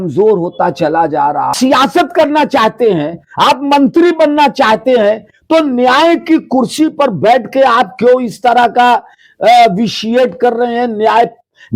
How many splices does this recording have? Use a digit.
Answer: 1